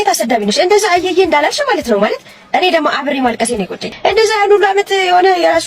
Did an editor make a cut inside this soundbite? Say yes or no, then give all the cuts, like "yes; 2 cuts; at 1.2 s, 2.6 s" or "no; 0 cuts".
yes; 1 cut; at 3.8 s